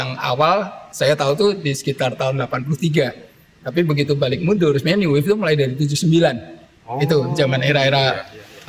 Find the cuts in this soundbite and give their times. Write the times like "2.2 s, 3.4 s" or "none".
none